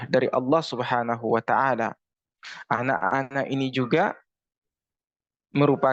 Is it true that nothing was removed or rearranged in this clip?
yes; 0 cuts

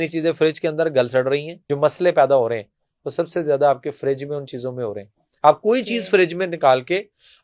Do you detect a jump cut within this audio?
yes; 1 cut; at 1.6 s

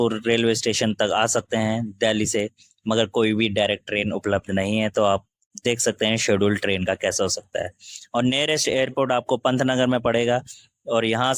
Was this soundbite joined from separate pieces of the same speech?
no; 0 cuts

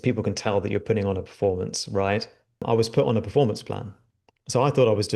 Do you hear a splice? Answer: yes; 1 cut; at 2.6 s

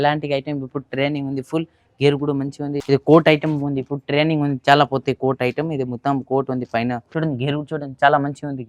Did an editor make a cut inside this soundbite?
yes; 2 cuts; at 2.8 s, 7.1 s

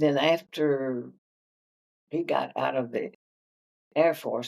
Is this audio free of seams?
yes; 0 cuts

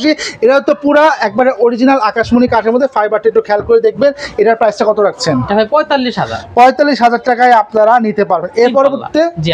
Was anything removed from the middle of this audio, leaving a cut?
no; 0 cuts

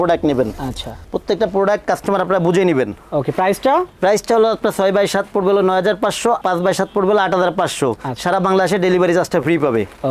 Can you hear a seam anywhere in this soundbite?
no; 0 cuts

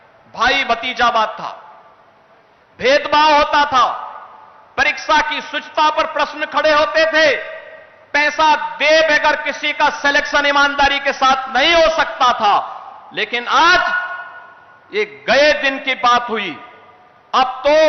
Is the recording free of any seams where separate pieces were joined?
yes; 0 cuts

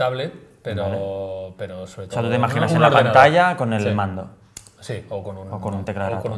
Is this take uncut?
no; 1 cut; at 4.3 s

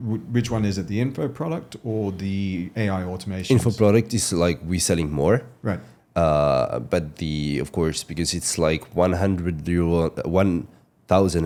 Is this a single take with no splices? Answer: yes; 0 cuts

